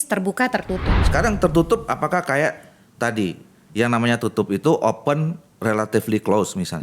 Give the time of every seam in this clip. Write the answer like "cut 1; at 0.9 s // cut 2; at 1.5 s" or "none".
cut 1; at 1.0 s